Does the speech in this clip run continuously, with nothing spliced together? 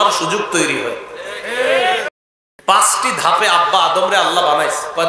no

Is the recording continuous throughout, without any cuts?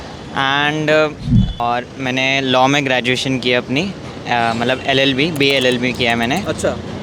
no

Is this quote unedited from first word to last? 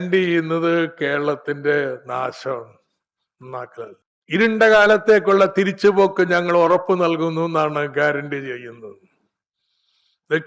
no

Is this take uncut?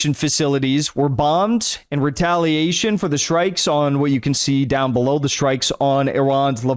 yes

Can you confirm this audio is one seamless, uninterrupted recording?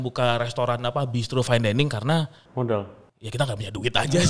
yes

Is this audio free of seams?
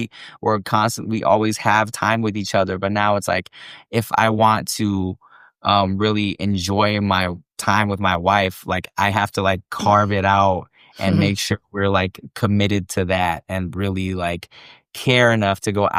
yes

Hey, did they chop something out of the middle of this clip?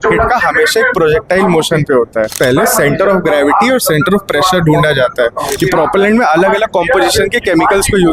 yes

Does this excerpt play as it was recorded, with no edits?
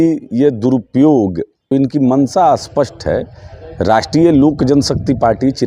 no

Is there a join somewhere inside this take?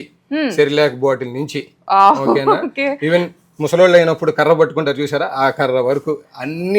no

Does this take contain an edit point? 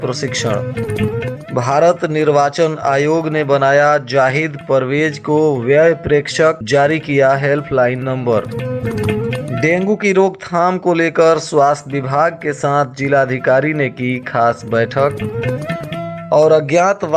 no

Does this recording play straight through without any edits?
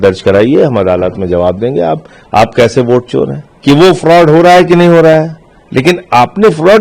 no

